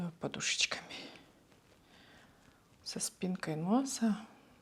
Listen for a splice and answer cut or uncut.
uncut